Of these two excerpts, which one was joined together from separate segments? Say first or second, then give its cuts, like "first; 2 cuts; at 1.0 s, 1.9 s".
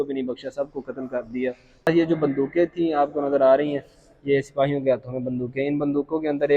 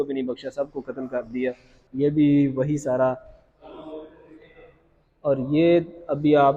first; 1 cut; at 1.9 s